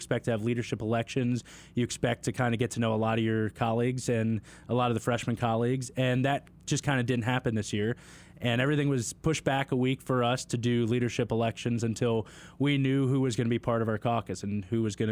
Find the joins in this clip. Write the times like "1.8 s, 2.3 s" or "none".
none